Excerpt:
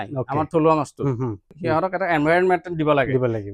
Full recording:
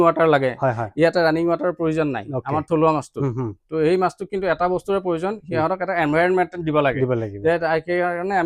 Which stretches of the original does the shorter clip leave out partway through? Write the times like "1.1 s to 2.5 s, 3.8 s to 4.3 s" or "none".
3.7 s to 5.4 s